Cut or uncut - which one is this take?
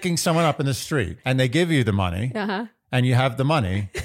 cut